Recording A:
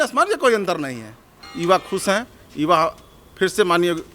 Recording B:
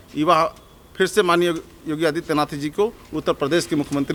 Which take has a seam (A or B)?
A